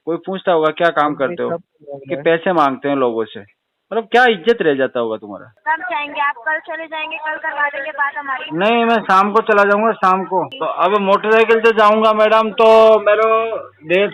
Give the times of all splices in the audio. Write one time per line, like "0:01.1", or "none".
0:05.5
0:10.6